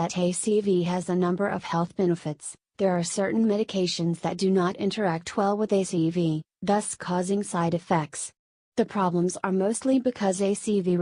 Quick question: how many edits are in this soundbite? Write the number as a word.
zero